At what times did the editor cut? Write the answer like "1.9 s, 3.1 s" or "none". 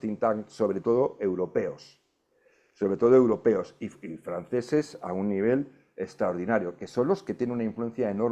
none